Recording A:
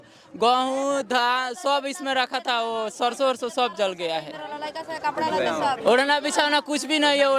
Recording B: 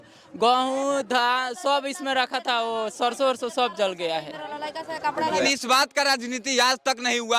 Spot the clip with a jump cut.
B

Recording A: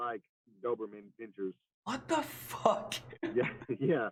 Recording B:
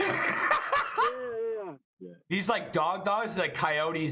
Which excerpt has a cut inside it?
B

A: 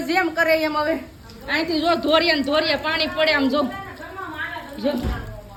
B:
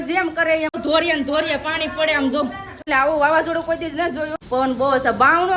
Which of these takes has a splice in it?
B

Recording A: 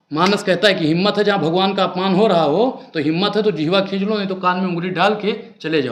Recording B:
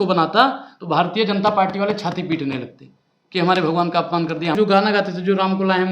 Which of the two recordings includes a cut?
B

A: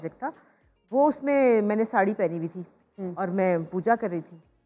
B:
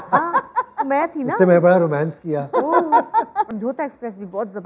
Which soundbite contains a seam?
B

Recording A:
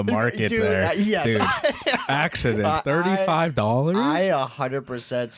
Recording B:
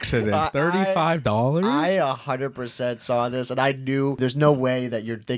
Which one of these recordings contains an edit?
B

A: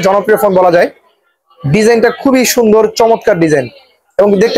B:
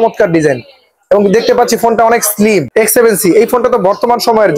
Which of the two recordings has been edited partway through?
B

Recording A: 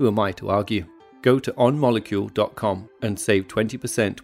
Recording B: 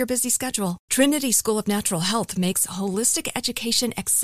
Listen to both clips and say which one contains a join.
A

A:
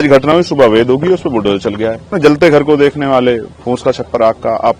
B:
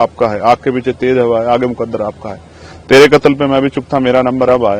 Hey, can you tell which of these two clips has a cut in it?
A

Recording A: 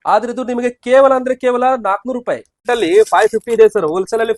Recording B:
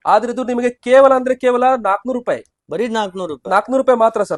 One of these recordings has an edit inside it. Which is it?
A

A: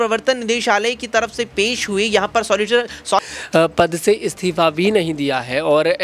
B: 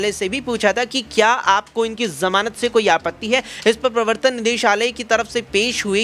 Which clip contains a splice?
A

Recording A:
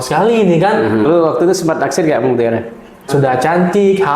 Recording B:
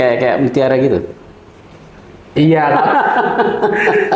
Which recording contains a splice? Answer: A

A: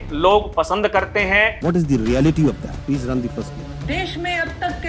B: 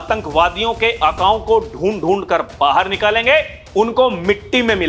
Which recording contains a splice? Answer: A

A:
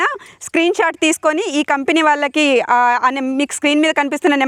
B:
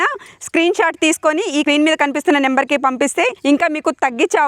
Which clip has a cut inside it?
B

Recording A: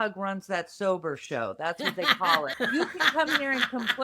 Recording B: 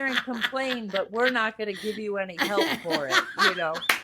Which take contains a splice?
A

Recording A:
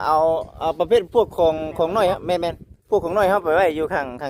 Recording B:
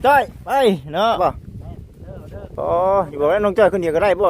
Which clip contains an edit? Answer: B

